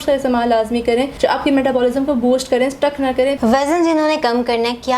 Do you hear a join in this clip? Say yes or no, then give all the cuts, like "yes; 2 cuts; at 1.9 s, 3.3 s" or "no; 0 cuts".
yes; 2 cuts; at 1.1 s, 3.4 s